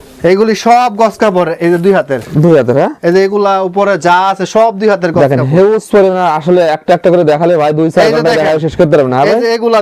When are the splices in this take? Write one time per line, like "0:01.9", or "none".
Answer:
none